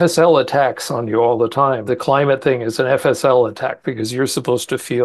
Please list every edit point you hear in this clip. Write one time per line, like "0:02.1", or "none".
0:01.8